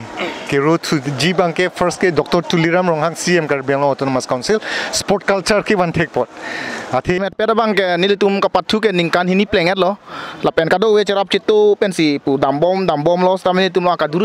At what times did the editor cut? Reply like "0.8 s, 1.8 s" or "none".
7.2 s